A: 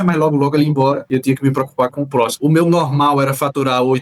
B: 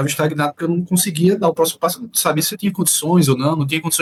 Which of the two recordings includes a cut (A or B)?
A